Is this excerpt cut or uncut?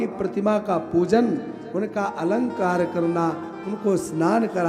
uncut